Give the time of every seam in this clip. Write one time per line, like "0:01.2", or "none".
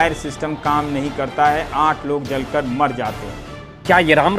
0:03.5